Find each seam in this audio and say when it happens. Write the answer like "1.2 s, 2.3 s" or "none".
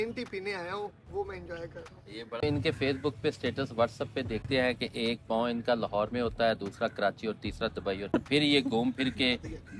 2.4 s, 4.4 s, 8.1 s